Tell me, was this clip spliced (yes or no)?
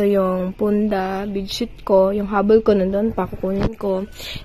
no